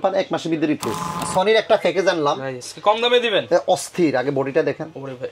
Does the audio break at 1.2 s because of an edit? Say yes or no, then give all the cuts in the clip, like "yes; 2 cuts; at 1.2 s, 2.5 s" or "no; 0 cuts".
yes; 1 cut; at 1.2 s